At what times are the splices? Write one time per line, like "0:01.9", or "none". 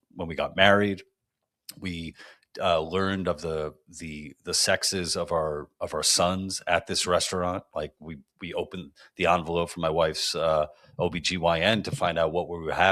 none

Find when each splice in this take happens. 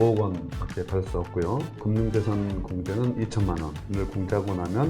0:01.8
0:03.8

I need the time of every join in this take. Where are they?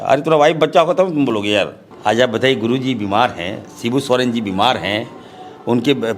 0:01.8

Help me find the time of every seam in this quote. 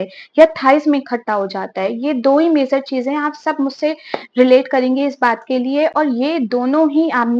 none

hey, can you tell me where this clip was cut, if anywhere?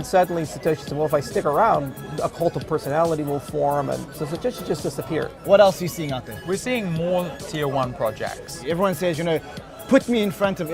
0:04.1
0:05.4
0:06.3
0:08.6

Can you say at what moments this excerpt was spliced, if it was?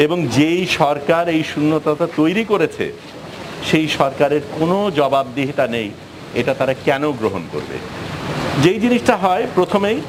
none

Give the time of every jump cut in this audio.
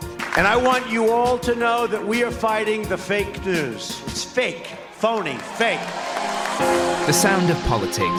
none

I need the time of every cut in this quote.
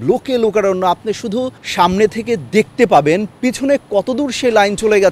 0:01.6

